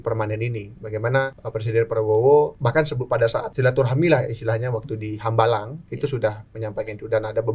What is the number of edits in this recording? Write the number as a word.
three